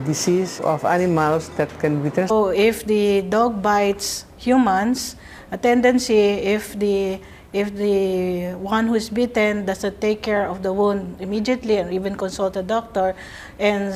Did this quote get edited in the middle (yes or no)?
no